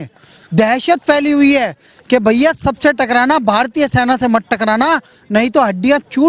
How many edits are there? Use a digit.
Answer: 0